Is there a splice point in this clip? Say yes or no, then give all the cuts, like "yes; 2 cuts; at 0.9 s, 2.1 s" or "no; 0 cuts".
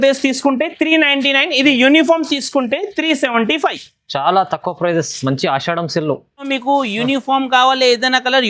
yes; 1 cut; at 6.5 s